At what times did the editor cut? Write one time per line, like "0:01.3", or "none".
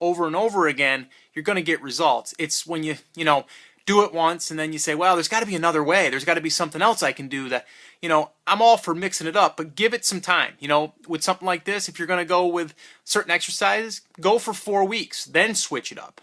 0:07.8